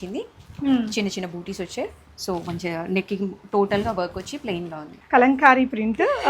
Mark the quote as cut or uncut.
cut